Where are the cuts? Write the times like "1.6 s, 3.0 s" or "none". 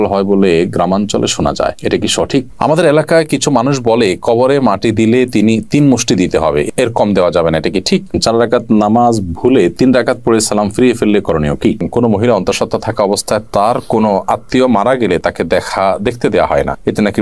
2.5 s, 8.1 s, 11.8 s